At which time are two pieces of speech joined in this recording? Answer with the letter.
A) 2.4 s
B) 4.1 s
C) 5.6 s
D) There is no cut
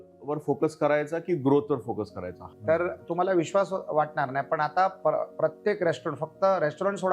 A